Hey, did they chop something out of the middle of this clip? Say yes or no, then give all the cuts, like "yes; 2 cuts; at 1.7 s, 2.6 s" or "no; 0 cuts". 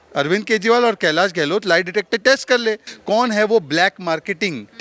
yes; 1 cut; at 2.9 s